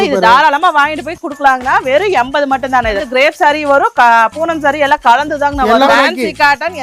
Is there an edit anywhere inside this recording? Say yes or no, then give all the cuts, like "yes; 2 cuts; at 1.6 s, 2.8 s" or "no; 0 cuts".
yes; 2 cuts; at 3.0 s, 5.9 s